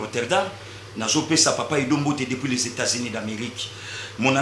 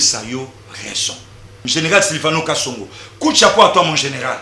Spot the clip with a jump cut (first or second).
second